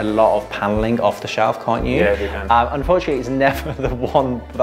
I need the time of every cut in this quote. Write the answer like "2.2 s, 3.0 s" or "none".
none